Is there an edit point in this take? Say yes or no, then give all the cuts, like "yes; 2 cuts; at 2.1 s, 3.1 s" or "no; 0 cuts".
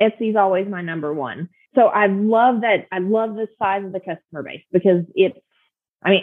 yes; 1 cut; at 1.6 s